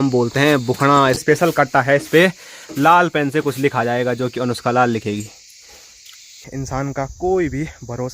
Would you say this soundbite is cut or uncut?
cut